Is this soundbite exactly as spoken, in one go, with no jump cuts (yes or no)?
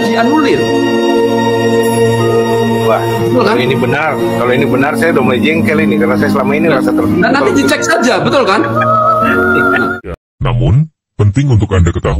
no